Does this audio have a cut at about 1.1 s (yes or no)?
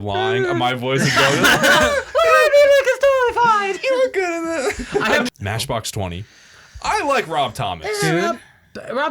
no